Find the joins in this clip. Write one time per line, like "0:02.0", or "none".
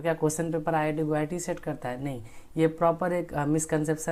none